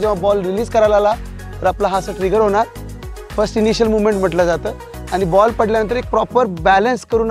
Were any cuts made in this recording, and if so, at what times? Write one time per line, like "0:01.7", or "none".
none